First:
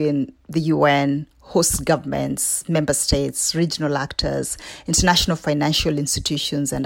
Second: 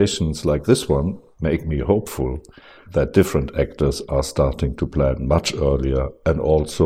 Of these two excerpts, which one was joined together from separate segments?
second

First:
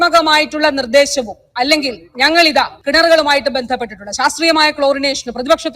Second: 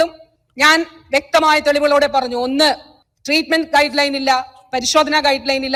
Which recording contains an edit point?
first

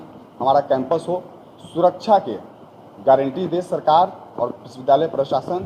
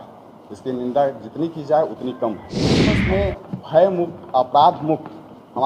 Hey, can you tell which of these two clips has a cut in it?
second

